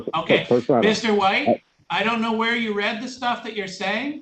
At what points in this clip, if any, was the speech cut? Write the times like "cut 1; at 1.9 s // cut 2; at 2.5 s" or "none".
cut 1; at 1.8 s